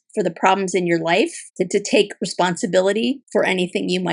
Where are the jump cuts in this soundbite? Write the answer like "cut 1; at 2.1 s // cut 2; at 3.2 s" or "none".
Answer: cut 1; at 1.4 s // cut 2; at 3.2 s

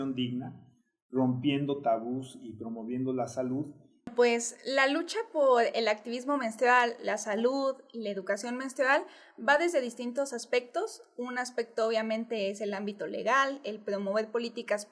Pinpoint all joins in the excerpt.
cut 1; at 4.1 s

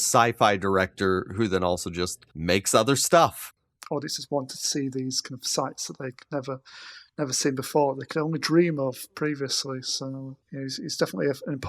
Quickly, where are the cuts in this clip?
cut 1; at 2.2 s // cut 2; at 3.4 s // cut 3; at 10.4 s

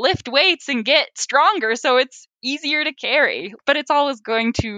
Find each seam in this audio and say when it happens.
cut 1; at 1.2 s // cut 2; at 3.6 s

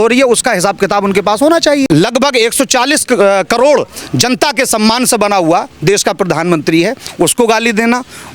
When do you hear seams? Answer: cut 1; at 1.9 s

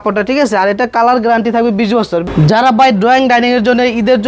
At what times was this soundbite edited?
cut 1; at 2.2 s

